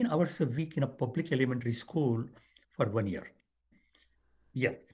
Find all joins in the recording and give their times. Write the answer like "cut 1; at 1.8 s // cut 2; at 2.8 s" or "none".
cut 1; at 3.8 s